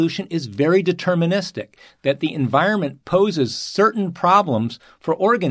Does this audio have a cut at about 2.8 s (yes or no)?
no